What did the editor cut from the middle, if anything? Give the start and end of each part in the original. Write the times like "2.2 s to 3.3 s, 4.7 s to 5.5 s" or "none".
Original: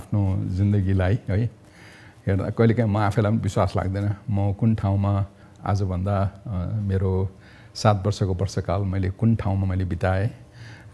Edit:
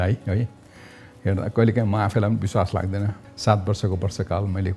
4.2 s to 7.5 s